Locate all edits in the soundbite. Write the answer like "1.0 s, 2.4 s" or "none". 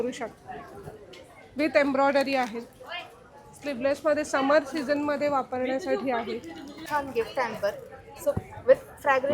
6.8 s